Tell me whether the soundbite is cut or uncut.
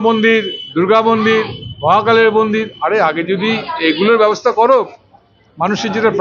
uncut